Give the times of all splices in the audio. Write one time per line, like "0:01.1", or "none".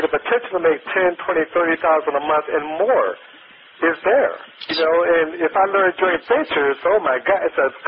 none